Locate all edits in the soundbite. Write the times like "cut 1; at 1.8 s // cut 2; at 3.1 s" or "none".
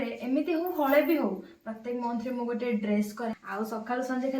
cut 1; at 3.4 s